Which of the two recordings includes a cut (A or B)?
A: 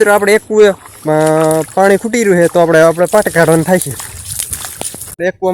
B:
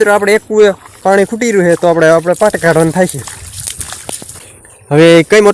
B